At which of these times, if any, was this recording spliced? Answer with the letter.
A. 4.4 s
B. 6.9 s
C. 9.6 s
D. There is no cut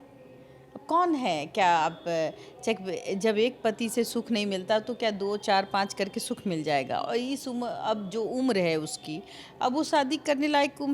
D